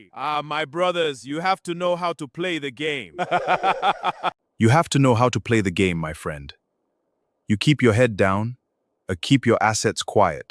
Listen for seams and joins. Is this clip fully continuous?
no; 1 cut; at 4.4 s

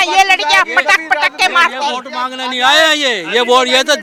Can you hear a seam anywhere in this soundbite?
no; 0 cuts

